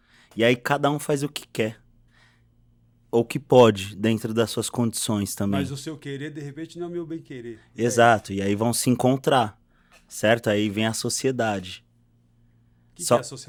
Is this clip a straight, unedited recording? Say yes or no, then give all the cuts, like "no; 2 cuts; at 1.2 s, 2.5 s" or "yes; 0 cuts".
yes; 0 cuts